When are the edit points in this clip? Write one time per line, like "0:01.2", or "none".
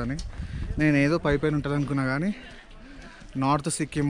none